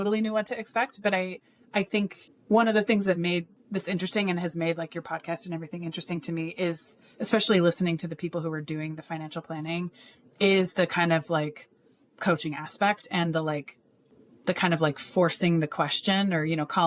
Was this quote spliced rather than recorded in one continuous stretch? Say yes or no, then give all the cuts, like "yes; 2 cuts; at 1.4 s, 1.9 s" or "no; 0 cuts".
yes; 2 cuts; at 2.3 s, 3.6 s